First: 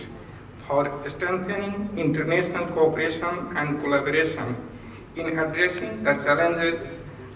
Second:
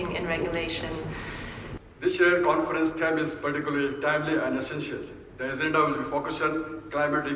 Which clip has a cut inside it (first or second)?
second